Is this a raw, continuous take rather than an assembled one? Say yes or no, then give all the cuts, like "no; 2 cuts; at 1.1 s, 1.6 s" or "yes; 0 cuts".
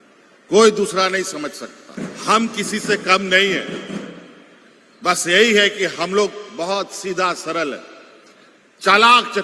no; 1 cut; at 1.8 s